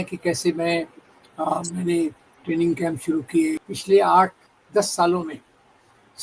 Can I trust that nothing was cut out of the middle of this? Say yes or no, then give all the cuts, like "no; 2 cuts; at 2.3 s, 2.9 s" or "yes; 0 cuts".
no; 1 cut; at 3.7 s